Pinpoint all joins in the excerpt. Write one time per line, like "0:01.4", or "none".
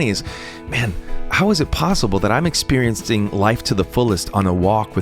0:01.2